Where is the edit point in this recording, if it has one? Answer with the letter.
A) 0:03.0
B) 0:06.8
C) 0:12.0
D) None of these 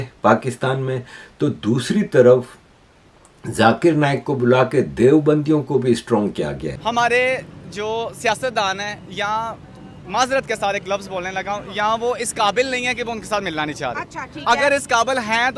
B